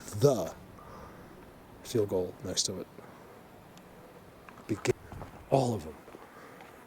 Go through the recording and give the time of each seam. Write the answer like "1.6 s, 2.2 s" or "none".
4.9 s